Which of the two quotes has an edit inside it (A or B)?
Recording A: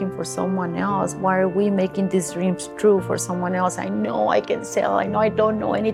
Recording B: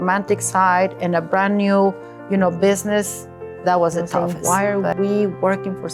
B